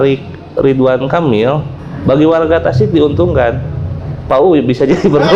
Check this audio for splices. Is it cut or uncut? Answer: uncut